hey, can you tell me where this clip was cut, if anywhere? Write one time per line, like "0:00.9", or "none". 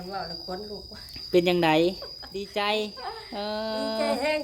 0:02.5